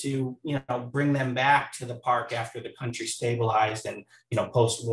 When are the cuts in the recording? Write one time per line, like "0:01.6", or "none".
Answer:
none